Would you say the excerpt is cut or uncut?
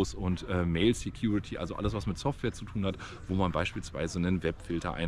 uncut